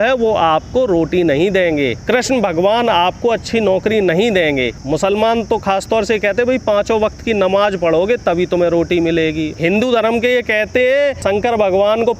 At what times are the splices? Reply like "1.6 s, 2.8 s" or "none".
2.0 s, 4.8 s, 9.5 s, 11.2 s

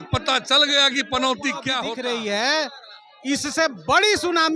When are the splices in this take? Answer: 1.8 s

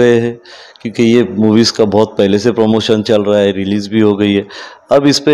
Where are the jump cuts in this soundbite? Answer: none

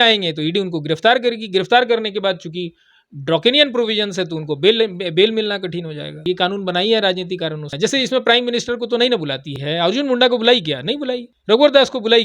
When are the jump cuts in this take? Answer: 6.2 s, 7.7 s, 9.5 s, 11.3 s

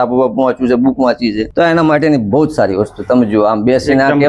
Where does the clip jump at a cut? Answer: 1.4 s

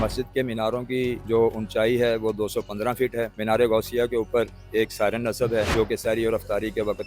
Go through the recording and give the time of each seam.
1.2 s, 3.3 s, 5.7 s

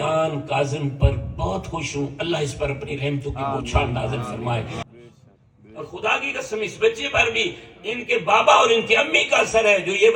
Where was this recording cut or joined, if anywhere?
4.8 s

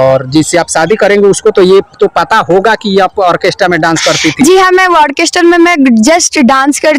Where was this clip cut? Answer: none

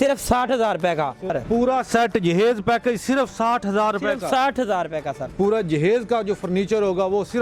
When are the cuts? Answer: 1.2 s, 5.2 s

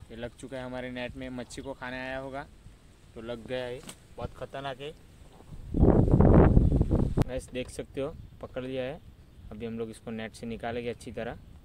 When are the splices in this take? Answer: none

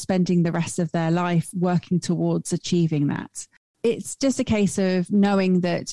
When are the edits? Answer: 3.6 s

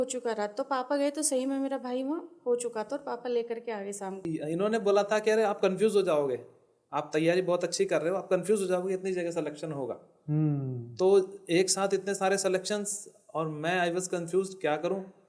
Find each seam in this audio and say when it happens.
4.3 s

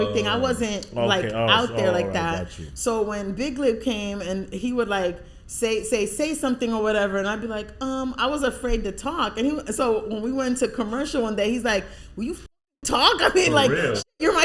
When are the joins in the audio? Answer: none

